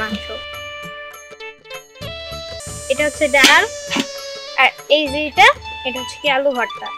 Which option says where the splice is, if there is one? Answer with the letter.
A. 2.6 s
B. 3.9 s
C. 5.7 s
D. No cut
A